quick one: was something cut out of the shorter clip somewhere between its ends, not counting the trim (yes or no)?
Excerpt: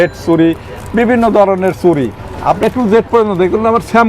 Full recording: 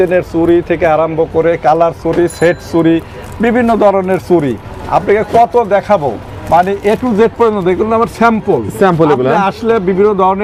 yes